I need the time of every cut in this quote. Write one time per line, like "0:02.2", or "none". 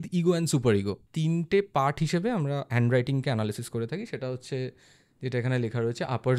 0:01.0